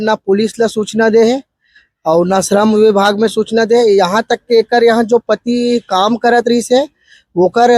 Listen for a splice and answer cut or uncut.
uncut